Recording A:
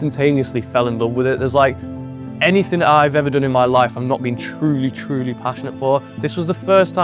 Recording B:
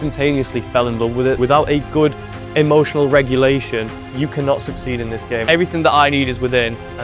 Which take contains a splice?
B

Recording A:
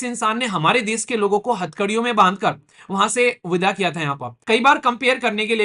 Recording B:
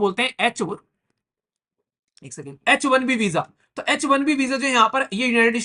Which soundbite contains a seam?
A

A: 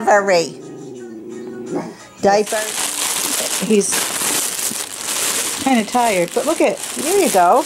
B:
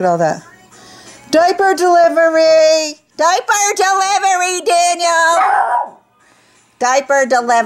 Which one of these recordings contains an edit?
A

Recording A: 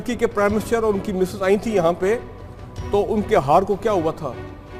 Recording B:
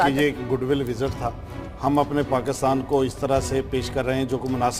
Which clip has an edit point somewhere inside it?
B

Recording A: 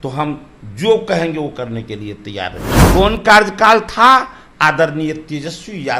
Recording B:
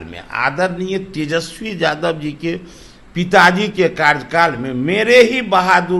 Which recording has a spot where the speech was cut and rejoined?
A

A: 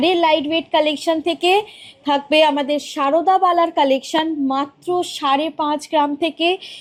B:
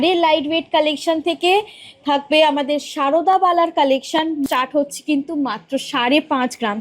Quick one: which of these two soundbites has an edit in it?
B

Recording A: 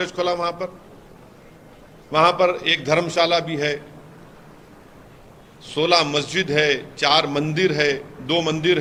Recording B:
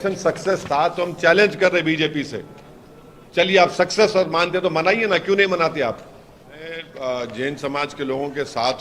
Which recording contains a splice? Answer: B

